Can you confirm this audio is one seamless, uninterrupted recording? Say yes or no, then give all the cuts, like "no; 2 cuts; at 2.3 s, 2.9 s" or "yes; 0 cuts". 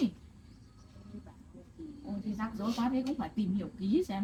yes; 0 cuts